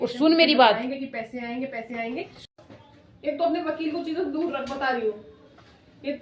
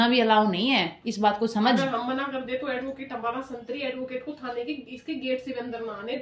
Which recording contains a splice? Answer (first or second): first